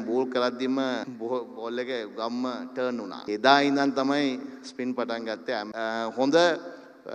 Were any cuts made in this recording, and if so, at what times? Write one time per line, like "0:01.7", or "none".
0:01.1
0:03.3
0:05.7

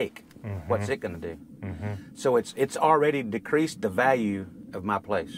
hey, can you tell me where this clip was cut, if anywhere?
none

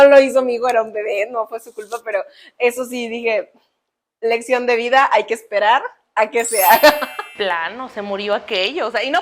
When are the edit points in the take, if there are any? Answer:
0:07.1

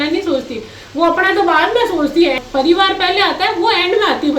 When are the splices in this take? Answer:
0:02.4

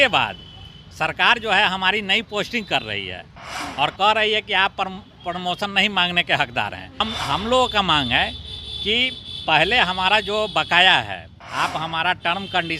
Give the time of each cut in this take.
0:07.0

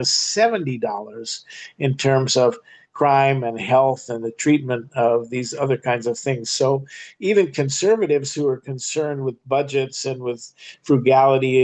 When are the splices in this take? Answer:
none

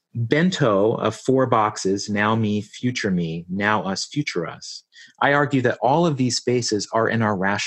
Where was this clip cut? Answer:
none

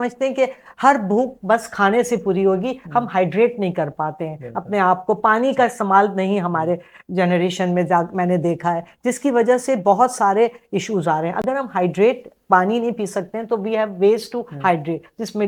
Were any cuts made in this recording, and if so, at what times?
none

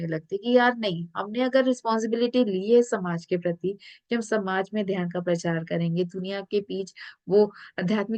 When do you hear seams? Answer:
none

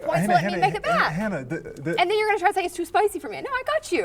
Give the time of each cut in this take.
none

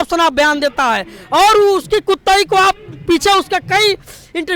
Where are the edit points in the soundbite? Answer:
none

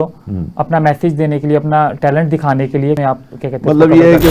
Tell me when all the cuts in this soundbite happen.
0:03.0

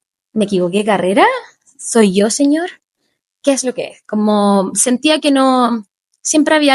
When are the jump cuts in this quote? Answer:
none

